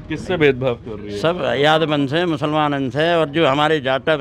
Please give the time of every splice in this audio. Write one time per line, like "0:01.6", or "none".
none